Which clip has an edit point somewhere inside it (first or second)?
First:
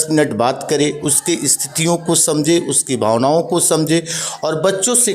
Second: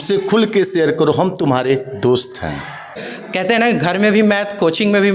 second